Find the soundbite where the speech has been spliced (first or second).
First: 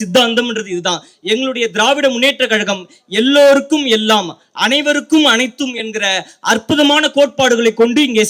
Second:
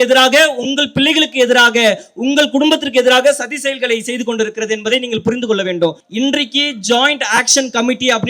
second